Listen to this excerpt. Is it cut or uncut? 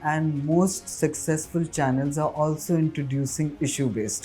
uncut